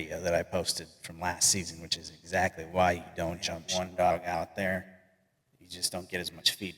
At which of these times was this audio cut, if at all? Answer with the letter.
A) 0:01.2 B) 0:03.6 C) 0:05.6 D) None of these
B